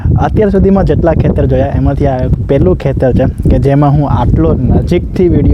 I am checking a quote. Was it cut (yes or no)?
no